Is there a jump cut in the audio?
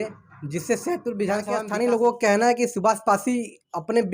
yes; 1 cut; at 1.6 s

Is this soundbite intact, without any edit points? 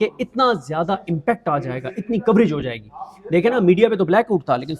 yes; 0 cuts

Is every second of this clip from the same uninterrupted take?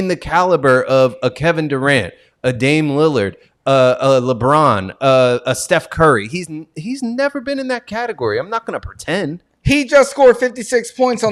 yes; 0 cuts

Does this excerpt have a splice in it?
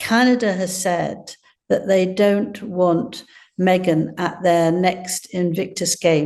no; 0 cuts

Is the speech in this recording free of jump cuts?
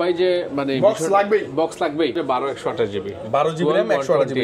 no; 1 cut; at 2.2 s

